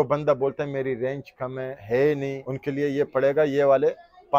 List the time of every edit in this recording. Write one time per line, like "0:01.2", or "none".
0:01.8
0:02.5